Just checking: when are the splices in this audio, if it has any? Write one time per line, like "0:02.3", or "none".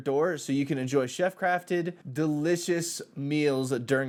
none